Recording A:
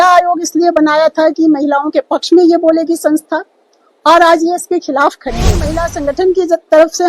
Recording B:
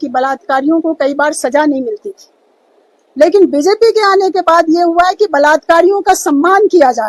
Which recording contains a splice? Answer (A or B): A